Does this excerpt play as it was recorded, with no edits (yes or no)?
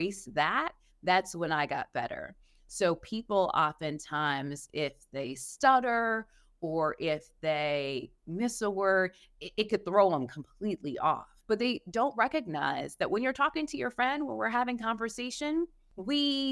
yes